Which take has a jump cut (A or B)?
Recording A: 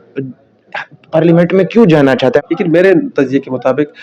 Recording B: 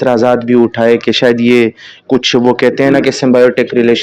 A